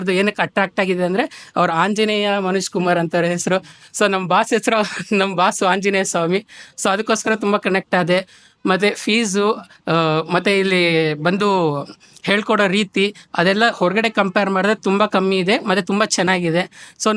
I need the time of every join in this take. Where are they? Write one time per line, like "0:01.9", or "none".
none

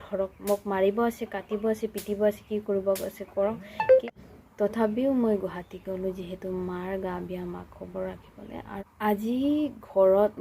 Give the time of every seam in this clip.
0:04.0
0:08.8

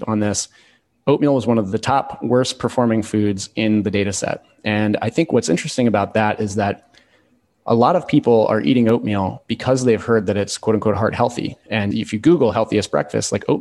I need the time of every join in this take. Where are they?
0:01.7
0:11.9

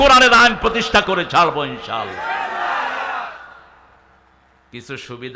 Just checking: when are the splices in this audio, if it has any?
none

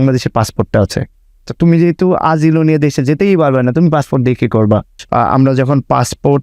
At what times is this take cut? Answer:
0:05.0

